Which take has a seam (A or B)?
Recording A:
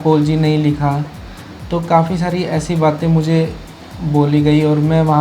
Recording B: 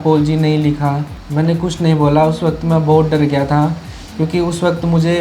B